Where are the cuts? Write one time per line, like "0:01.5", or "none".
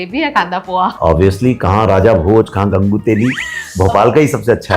0:01.0